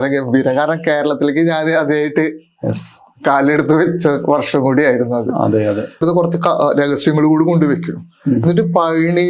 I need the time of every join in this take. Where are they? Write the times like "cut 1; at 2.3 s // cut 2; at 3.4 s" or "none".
cut 1; at 6.0 s